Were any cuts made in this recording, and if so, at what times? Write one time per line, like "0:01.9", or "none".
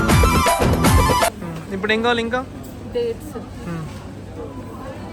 0:01.3